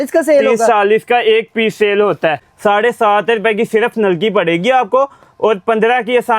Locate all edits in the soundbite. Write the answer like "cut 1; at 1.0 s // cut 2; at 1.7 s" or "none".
cut 1; at 2.5 s